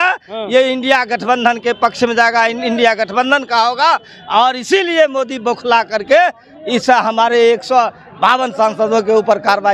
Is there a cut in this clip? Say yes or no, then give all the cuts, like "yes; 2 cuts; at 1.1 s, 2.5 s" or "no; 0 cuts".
no; 0 cuts